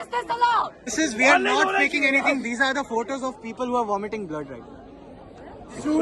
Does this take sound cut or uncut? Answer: cut